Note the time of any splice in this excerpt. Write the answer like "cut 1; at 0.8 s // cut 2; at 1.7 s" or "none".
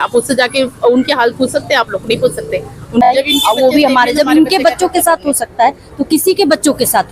cut 1; at 3.1 s